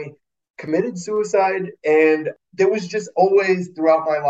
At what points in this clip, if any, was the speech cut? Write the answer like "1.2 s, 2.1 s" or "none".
2.3 s